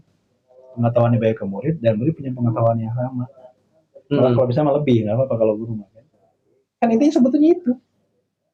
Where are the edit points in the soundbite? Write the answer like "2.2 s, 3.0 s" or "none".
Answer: none